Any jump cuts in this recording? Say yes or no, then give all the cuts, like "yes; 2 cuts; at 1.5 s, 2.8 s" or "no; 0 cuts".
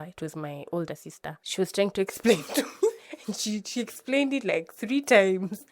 yes; 1 cut; at 1.4 s